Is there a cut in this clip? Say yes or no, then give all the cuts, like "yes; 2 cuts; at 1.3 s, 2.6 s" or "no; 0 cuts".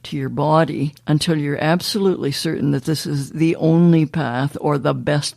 yes; 1 cut; at 0.9 s